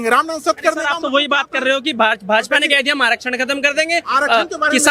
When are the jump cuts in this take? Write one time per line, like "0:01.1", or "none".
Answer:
none